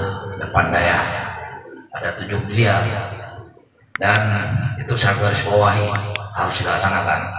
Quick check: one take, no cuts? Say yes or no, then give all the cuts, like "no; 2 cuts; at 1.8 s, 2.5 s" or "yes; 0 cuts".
yes; 0 cuts